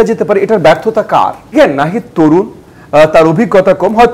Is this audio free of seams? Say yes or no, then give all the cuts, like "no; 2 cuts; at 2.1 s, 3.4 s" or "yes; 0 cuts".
no; 1 cut; at 1.5 s